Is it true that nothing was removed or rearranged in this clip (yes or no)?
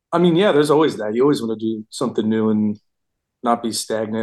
yes